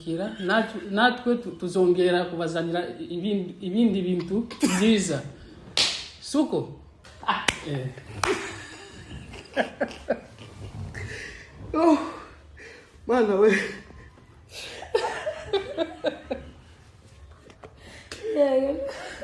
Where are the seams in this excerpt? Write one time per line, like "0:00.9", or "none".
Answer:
none